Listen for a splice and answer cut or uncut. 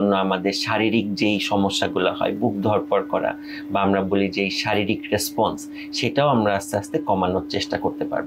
uncut